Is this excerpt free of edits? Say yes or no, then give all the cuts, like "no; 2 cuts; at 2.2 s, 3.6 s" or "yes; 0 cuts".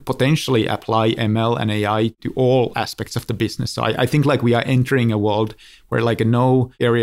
yes; 0 cuts